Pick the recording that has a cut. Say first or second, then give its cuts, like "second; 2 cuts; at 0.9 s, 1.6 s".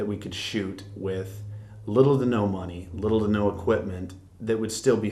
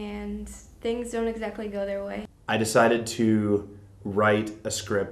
second; 1 cut; at 2.3 s